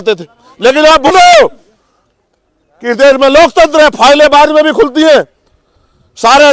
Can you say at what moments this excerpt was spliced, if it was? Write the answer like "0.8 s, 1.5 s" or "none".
1.1 s